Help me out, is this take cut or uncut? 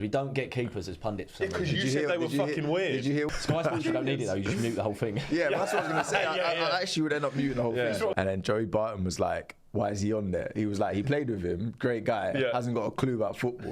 cut